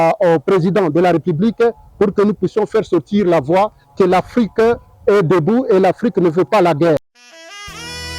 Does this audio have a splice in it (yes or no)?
yes